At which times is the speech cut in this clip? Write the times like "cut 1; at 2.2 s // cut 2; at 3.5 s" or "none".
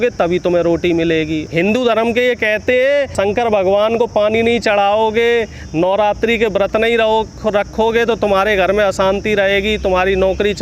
cut 1; at 1.4 s // cut 2; at 3.1 s